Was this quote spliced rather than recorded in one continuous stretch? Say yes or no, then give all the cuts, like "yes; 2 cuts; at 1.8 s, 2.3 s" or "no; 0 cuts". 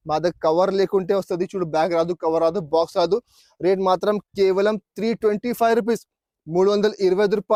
no; 0 cuts